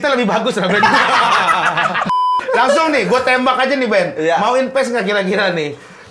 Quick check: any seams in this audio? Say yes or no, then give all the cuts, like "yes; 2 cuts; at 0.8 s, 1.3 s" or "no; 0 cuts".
yes; 1 cut; at 2.4 s